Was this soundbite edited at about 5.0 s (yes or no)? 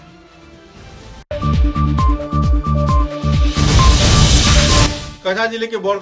yes